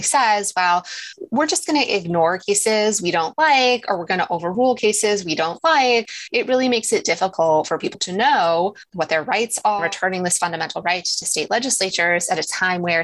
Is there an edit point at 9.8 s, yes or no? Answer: yes